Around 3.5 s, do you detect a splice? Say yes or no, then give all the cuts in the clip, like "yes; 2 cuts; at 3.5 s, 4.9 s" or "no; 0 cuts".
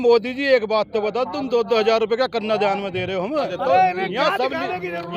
yes; 1 cut; at 3.5 s